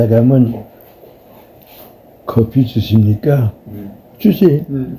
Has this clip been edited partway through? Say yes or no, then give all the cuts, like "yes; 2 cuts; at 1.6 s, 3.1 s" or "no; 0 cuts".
no; 0 cuts